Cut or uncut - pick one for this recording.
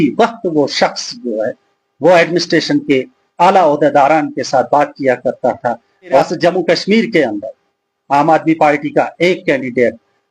cut